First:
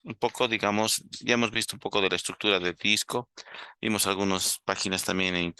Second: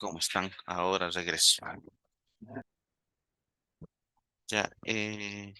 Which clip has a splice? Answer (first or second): second